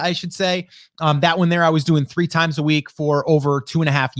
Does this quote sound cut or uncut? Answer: uncut